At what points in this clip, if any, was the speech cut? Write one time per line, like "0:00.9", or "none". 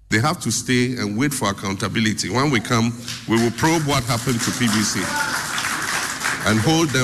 none